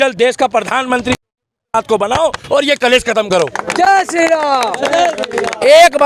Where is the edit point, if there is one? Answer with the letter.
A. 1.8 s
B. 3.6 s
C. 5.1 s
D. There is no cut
D